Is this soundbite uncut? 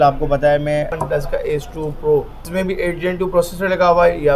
no; 2 cuts; at 1.0 s, 2.4 s

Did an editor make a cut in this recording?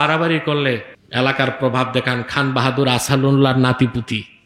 yes; 1 cut; at 1.0 s

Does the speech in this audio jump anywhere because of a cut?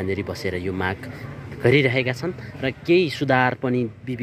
no; 0 cuts

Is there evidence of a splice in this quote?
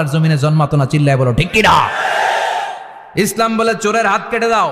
yes; 1 cut; at 3.2 s

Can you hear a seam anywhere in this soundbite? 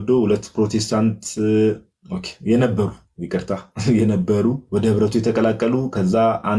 yes; 1 cut; at 4.6 s

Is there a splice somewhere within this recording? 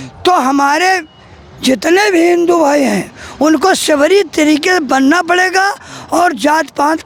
no; 0 cuts

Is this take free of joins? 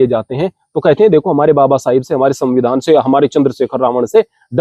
yes; 0 cuts

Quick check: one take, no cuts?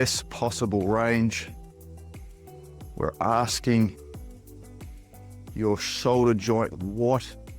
no; 4 cuts; at 1.4 s, 2.9 s, 4.0 s, 5.4 s

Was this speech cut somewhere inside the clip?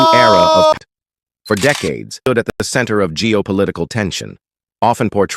yes; 2 cuts; at 0.8 s, 2.5 s

